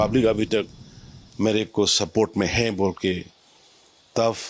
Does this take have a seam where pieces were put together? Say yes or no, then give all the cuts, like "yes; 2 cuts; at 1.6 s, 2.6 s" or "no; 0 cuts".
no; 0 cuts